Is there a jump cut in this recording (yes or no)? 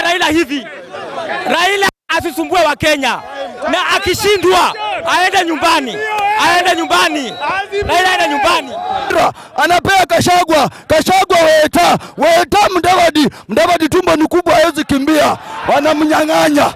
yes